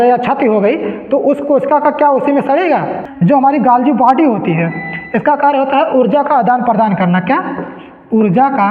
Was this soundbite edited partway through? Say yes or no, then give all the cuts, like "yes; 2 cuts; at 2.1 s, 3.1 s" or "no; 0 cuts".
yes; 1 cut; at 3.0 s